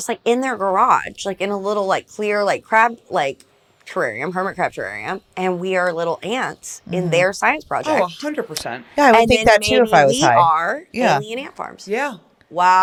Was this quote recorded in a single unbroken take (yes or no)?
yes